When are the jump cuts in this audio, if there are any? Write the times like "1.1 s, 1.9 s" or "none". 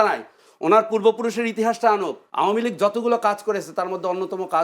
2.2 s